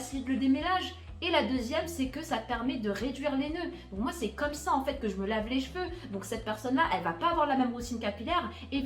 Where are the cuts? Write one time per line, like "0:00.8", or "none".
none